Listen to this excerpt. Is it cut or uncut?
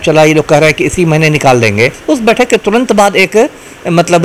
cut